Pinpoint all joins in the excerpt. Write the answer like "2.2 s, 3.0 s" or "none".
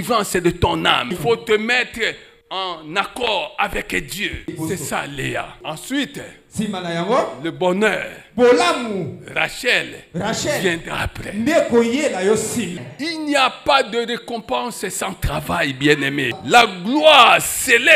1.1 s, 4.5 s, 5.6 s, 12.7 s, 16.3 s